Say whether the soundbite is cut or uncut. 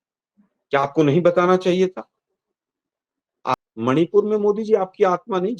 cut